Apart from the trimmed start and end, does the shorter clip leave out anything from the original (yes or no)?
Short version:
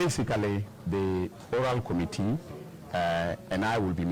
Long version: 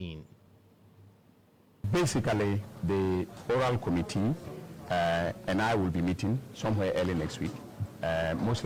no